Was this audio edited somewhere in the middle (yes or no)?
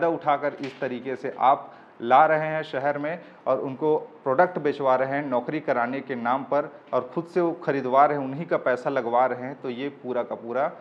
no